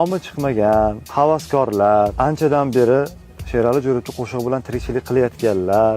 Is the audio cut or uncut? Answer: cut